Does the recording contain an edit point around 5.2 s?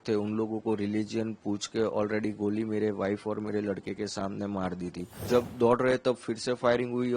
yes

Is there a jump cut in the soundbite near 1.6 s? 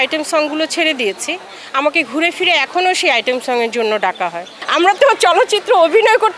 no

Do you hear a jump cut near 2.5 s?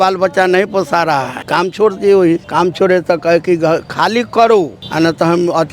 yes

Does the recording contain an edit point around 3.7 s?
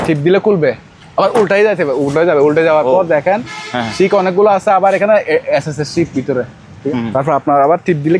no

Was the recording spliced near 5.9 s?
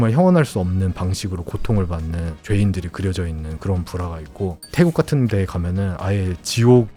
no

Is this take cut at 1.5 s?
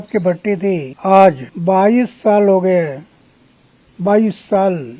yes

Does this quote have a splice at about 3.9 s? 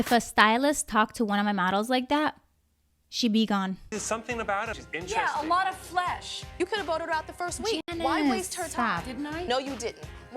yes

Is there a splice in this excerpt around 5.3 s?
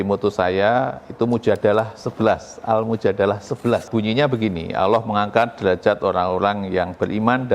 no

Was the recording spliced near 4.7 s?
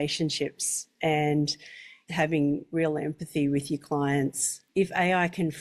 yes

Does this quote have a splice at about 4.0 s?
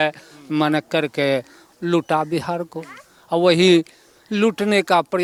no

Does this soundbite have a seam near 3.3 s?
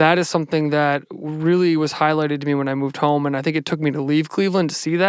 no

